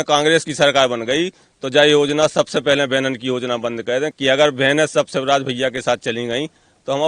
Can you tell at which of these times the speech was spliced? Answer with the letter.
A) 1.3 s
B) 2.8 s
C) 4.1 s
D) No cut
C